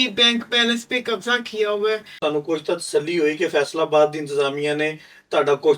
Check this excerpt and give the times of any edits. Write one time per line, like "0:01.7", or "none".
0:02.2